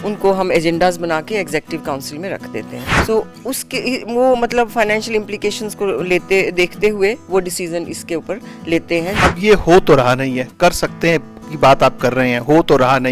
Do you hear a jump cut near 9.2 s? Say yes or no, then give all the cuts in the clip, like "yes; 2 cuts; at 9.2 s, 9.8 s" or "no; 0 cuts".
yes; 2 cuts; at 2.8 s, 9.2 s